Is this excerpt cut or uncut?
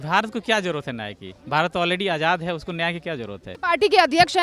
cut